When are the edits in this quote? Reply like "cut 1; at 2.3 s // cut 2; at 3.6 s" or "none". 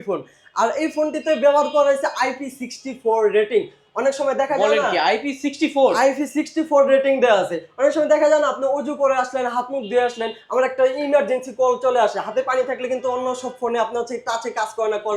none